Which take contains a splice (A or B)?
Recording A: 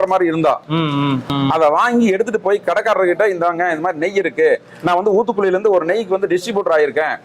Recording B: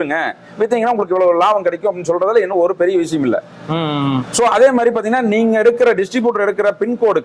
A